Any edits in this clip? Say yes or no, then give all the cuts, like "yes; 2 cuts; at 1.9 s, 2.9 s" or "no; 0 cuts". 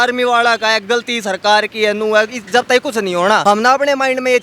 yes; 1 cut; at 3.4 s